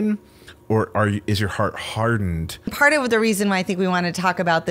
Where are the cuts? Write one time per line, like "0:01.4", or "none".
0:02.7